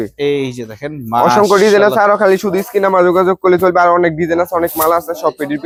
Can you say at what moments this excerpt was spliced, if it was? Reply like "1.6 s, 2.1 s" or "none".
none